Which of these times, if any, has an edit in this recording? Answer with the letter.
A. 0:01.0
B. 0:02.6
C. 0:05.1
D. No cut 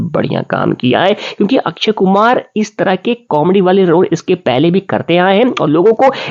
D